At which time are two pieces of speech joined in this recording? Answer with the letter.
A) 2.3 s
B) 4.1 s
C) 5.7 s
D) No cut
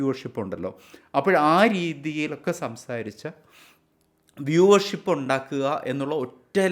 D